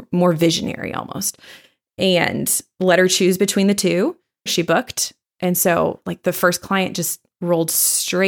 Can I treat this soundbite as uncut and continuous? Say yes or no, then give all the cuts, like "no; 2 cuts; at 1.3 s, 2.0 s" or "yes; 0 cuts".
no; 1 cut; at 4.5 s